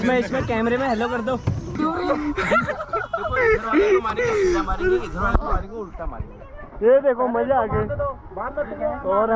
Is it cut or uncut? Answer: cut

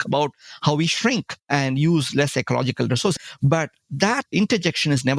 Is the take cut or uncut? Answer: uncut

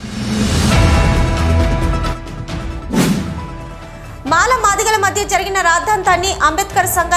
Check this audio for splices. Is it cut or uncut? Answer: uncut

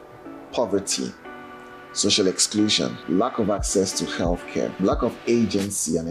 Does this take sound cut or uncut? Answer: cut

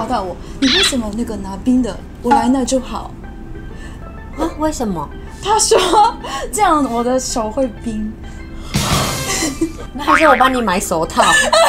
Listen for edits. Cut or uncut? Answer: uncut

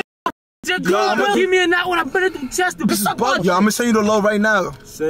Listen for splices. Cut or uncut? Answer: cut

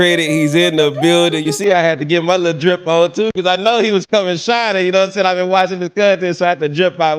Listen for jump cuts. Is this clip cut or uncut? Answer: cut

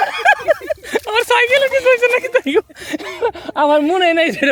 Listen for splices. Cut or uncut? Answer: uncut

